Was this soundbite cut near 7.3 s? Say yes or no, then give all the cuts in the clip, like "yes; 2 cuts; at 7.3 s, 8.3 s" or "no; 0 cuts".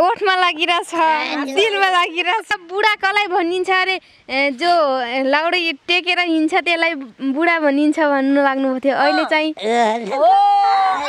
no; 1 cut; at 2.5 s